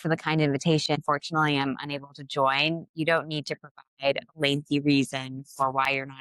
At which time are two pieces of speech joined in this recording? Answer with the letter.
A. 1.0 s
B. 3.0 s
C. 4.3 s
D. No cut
A